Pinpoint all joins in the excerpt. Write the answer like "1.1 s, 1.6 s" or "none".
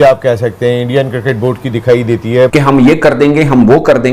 2.5 s